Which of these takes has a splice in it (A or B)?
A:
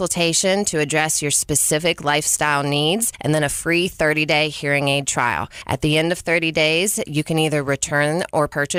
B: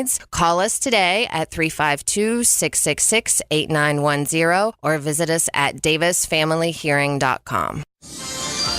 B